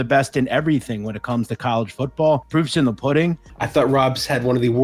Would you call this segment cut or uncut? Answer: cut